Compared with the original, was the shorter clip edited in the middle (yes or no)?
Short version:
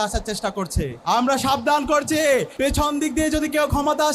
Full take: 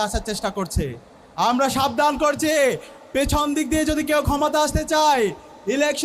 yes